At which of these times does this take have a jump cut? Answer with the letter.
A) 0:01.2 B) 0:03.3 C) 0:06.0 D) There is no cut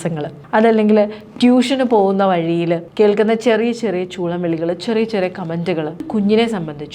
C